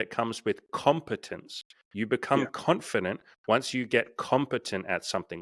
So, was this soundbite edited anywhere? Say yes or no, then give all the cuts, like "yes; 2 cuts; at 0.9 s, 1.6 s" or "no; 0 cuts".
no; 0 cuts